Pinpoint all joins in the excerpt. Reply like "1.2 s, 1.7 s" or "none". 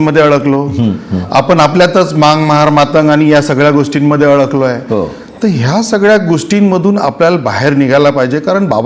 none